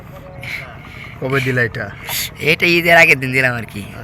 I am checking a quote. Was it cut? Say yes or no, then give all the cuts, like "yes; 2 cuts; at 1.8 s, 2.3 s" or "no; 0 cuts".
no; 0 cuts